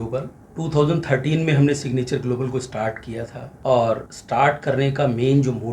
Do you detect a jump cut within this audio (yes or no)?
yes